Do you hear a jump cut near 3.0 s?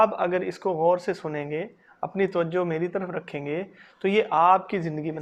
no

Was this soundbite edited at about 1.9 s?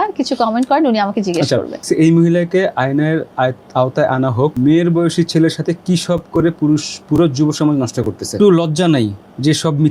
yes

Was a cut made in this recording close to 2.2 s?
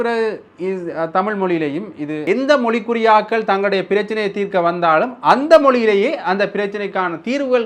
yes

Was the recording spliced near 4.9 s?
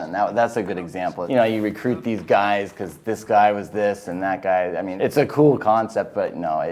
yes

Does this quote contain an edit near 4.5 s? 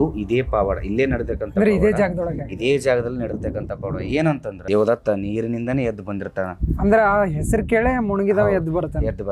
yes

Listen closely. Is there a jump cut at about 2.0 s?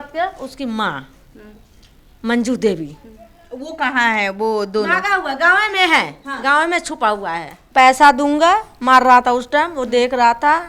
no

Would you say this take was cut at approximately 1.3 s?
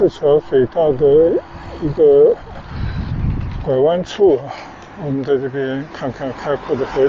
no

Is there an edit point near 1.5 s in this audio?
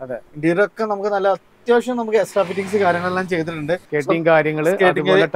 no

